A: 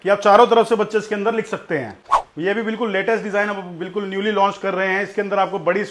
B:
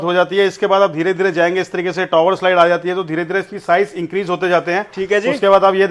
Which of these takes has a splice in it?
A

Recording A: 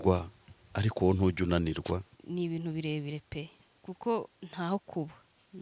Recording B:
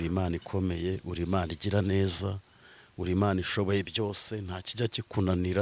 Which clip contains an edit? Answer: A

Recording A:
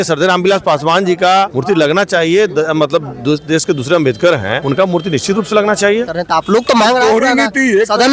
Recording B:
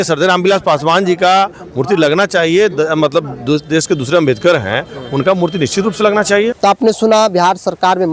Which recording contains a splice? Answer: A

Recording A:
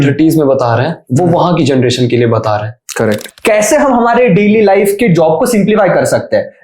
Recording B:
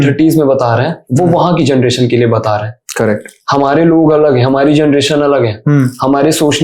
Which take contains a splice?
A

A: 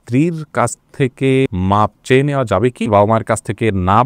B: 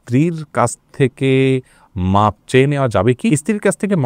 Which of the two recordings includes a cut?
A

